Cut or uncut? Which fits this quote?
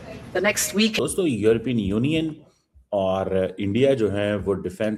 cut